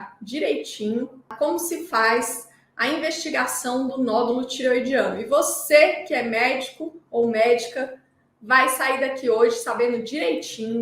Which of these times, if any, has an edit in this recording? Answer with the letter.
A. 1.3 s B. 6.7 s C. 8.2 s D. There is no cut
A